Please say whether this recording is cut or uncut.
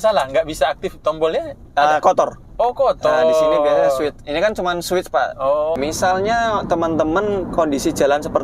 cut